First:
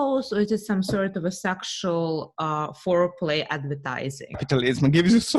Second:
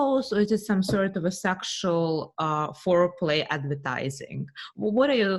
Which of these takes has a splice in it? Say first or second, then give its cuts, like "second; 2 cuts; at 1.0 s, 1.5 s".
first; 1 cut; at 4.4 s